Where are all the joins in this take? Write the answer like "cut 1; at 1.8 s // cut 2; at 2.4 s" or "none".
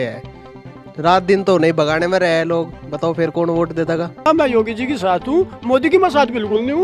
cut 1; at 4.3 s